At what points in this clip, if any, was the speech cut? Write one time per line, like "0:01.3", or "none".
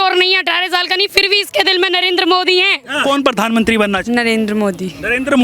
0:03.0
0:04.0